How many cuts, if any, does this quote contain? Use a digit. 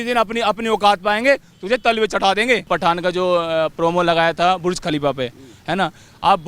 1